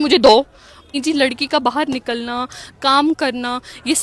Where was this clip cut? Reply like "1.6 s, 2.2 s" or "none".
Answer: 0.9 s